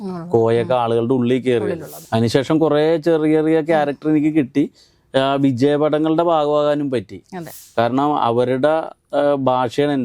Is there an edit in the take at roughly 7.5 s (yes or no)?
yes